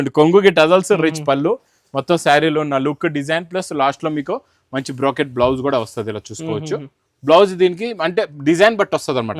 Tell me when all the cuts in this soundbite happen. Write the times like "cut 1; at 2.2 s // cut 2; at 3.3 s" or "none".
none